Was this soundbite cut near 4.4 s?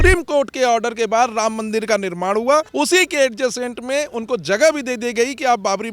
no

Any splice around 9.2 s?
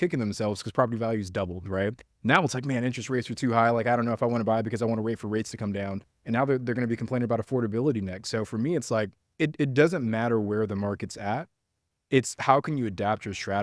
yes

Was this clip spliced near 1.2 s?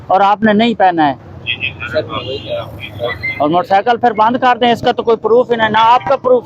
no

